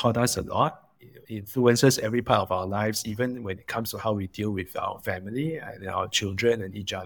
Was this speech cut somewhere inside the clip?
no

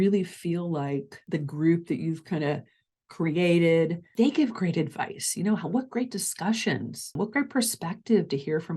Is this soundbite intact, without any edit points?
no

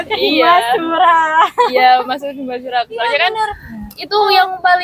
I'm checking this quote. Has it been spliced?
no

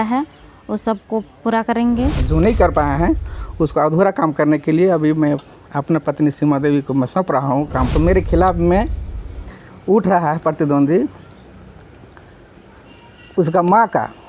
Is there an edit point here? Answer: yes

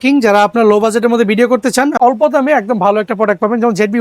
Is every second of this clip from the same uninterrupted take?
no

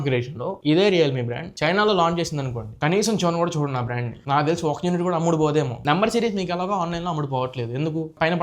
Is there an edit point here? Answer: yes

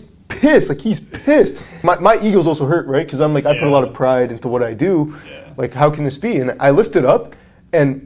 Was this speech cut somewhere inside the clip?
yes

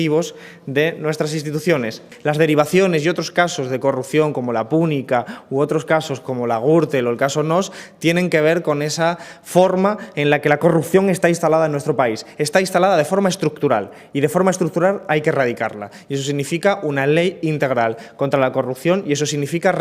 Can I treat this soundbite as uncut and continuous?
no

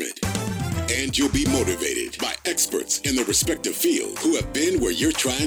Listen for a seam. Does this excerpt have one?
no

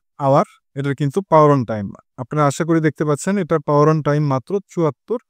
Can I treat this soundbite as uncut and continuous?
yes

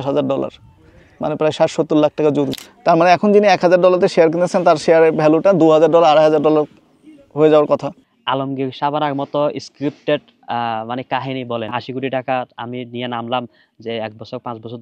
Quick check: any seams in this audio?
yes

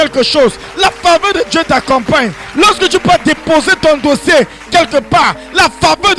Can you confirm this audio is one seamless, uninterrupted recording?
yes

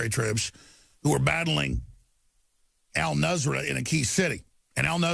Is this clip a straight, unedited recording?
no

